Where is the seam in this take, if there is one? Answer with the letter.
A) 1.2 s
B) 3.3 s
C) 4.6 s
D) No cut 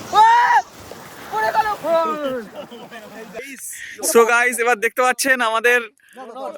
B